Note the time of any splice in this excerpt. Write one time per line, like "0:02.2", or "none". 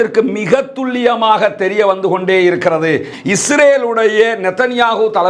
0:03.1